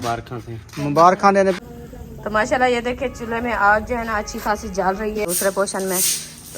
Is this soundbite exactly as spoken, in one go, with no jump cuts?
no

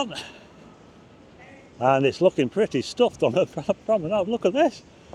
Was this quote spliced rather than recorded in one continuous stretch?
no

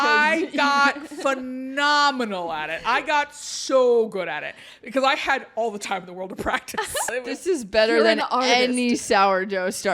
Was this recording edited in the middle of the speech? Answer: yes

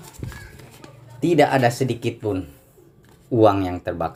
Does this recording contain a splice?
no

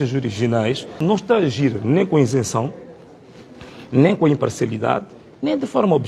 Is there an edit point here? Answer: yes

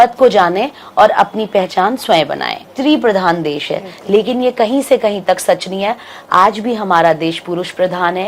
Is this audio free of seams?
no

